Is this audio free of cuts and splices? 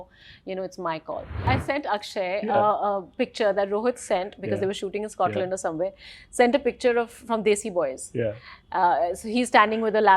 no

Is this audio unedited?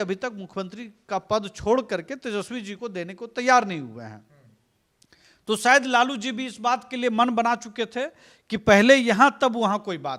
yes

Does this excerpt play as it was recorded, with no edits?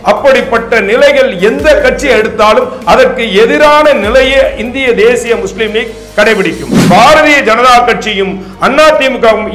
no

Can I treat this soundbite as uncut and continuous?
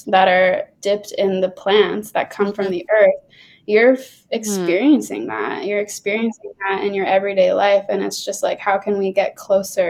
yes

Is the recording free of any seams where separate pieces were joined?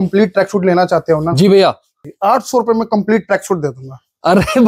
no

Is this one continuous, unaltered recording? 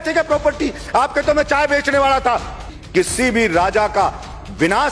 no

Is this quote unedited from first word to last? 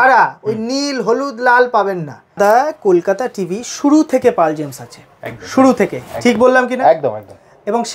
no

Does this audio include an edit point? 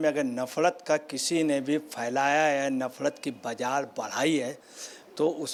no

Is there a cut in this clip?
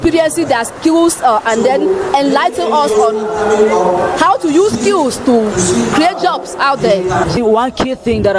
yes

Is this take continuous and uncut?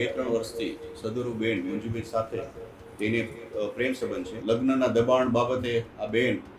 no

